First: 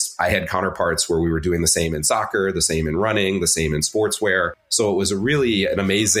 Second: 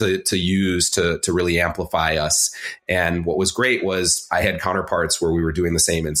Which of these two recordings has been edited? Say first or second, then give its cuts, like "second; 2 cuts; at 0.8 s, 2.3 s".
first; 1 cut; at 4.6 s